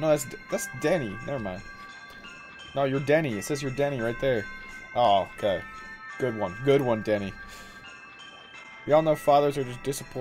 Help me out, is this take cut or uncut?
uncut